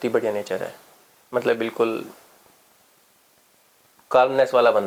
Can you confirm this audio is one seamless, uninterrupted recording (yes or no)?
yes